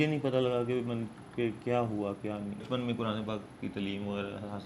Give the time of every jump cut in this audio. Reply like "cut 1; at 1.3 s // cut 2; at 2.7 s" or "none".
cut 1; at 2.6 s